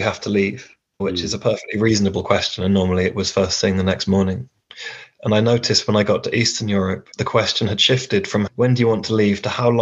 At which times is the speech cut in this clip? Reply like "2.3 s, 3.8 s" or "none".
1.0 s, 7.1 s